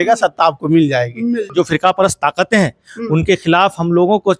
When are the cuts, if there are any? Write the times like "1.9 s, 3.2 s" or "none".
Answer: 1.5 s